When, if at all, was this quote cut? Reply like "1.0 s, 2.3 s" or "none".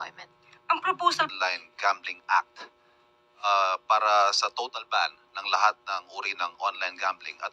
1.3 s

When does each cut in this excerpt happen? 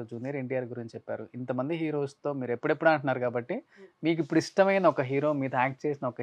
none

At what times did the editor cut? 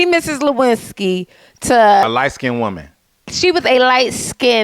2.0 s

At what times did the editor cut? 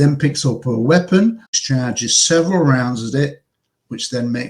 1.5 s

